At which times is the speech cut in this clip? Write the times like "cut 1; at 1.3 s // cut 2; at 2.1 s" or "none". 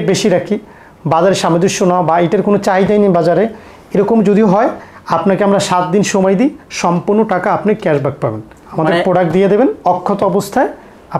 none